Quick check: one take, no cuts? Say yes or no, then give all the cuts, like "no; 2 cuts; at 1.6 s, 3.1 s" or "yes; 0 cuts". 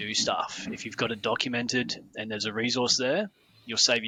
yes; 0 cuts